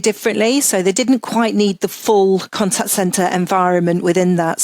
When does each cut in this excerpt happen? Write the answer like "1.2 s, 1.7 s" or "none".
2.5 s